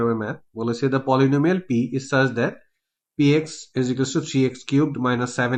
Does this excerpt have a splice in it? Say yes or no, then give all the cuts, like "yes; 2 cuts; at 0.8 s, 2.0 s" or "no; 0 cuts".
no; 0 cuts